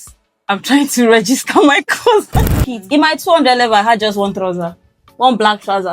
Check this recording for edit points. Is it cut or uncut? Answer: cut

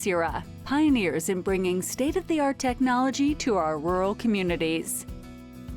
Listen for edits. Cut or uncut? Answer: cut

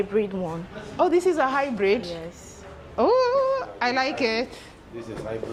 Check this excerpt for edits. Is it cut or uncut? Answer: uncut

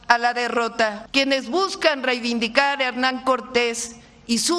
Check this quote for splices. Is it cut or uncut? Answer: cut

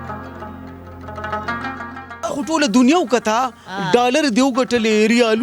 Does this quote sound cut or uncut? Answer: cut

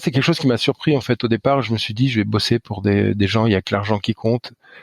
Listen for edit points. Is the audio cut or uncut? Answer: uncut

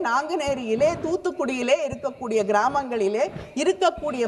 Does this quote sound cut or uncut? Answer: uncut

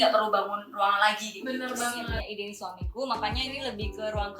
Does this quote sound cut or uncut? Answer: cut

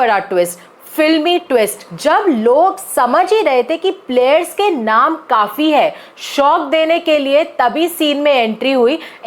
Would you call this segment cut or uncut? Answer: cut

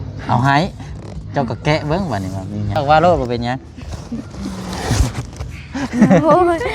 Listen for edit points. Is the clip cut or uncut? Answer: cut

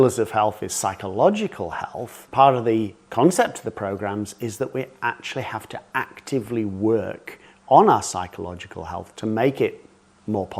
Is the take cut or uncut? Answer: cut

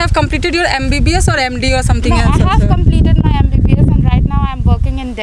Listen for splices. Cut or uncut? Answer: uncut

